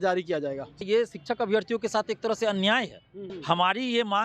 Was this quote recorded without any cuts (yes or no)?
no